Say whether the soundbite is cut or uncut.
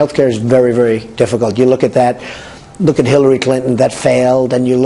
uncut